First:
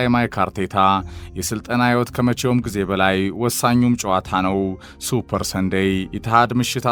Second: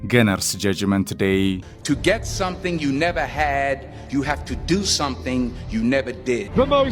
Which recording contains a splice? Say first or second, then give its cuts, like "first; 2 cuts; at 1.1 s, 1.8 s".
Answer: second; 1 cut; at 1.7 s